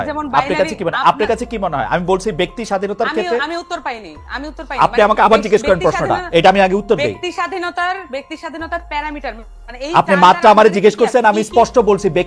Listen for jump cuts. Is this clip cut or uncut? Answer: uncut